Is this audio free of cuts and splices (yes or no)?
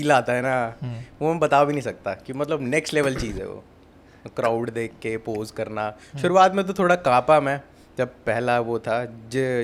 yes